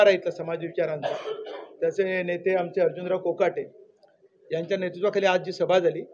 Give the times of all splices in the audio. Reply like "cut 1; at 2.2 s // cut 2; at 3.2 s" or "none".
none